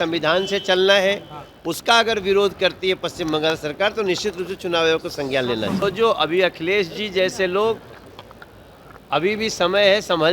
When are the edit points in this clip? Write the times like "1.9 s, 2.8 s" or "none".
5.8 s